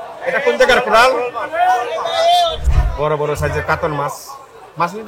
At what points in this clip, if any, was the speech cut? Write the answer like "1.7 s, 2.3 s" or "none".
2.6 s